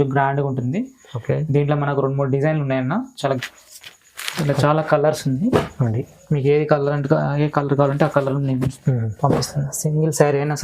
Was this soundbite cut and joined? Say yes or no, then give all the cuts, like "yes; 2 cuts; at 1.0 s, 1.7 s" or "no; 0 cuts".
yes; 1 cut; at 3.4 s